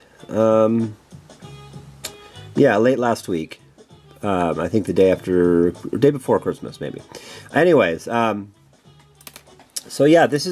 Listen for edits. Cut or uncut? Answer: cut